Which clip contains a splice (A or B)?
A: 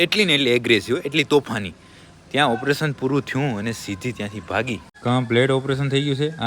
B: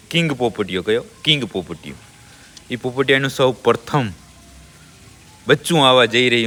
A